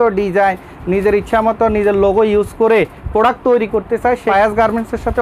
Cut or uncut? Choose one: cut